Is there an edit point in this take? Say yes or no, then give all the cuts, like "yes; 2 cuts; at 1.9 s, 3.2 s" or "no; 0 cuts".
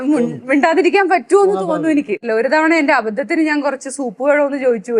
yes; 1 cut; at 2.2 s